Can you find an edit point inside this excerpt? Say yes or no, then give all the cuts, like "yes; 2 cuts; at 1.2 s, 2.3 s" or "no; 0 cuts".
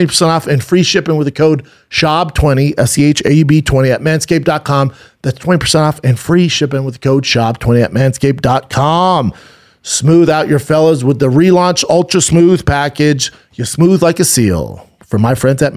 no; 0 cuts